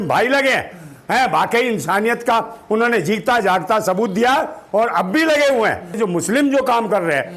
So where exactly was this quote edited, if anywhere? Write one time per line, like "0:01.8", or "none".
0:06.0